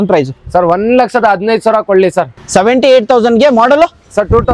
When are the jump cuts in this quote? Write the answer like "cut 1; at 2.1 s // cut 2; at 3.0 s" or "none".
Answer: cut 1; at 2.4 s